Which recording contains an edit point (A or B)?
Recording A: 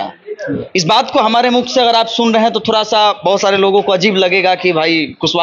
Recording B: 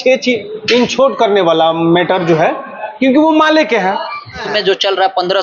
B